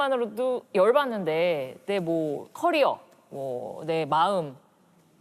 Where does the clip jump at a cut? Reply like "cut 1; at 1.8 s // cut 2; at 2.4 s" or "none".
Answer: none

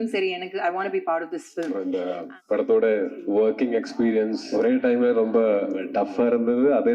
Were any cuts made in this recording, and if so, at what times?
cut 1; at 1.8 s // cut 2; at 3.2 s // cut 3; at 4.4 s // cut 4; at 5.8 s

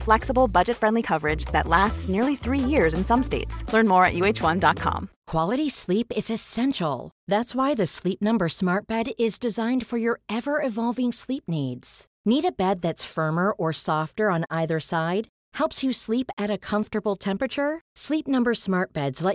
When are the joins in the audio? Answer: cut 1; at 5.1 s

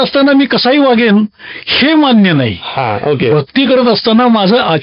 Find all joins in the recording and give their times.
none

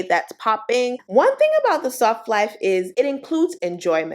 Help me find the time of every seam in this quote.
cut 1; at 1.0 s

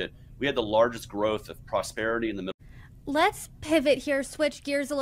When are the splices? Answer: none

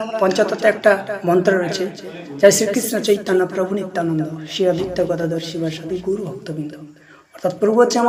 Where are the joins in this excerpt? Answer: none

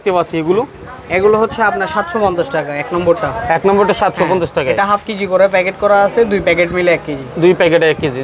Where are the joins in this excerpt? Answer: none

